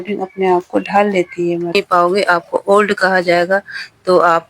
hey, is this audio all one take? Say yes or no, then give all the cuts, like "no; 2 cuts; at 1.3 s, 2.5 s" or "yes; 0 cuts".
no; 1 cut; at 1.7 s